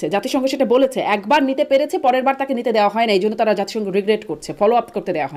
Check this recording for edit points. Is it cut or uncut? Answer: uncut